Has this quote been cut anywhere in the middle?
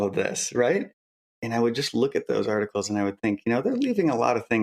yes; 1 cut; at 1.2 s

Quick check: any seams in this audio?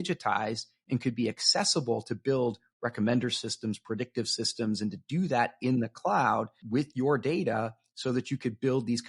yes; 1 cut; at 6.6 s

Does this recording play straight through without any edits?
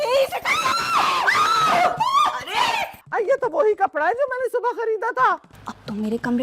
no; 2 cuts; at 2.9 s, 5.5 s

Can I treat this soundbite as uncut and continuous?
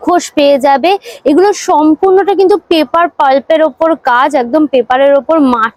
yes; 0 cuts

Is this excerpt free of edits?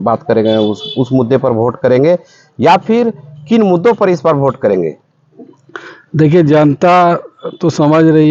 yes; 0 cuts

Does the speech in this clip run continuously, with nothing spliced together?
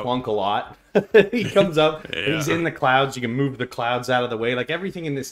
yes; 0 cuts

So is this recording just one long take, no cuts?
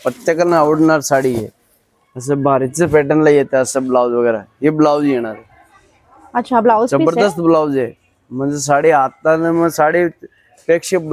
yes; 0 cuts

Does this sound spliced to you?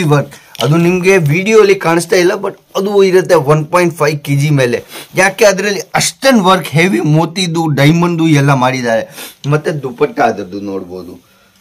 no; 0 cuts

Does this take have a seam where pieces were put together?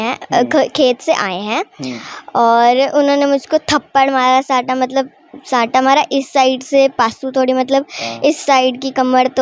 no; 0 cuts

